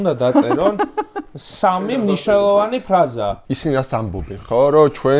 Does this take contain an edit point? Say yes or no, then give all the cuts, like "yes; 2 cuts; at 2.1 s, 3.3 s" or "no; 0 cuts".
yes; 1 cut; at 3.4 s